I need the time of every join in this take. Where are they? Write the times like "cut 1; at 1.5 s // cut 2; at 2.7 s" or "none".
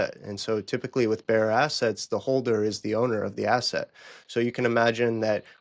none